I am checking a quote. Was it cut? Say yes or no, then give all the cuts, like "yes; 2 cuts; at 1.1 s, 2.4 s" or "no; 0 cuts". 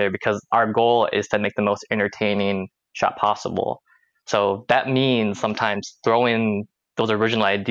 no; 0 cuts